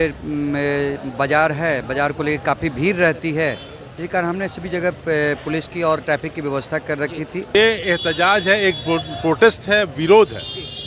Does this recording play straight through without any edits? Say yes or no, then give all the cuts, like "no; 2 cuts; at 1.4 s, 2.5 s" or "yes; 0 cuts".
no; 1 cut; at 7.5 s